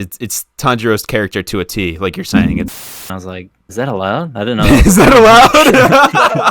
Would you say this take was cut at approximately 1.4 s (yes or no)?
no